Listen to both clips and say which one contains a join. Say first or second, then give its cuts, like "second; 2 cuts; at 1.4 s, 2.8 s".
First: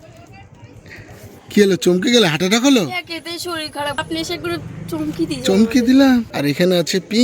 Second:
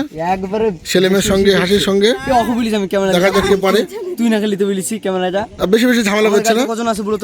first; 2 cuts; at 4.0 s, 6.3 s